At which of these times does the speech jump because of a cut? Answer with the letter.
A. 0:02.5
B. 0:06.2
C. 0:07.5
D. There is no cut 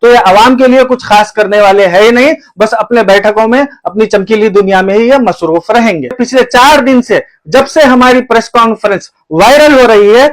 B